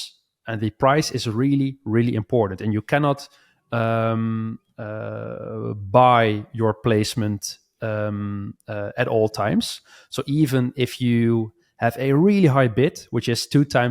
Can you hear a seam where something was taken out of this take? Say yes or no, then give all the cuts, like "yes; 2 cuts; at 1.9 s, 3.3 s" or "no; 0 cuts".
no; 0 cuts